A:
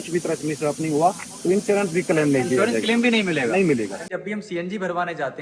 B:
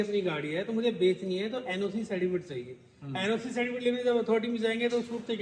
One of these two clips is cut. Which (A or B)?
A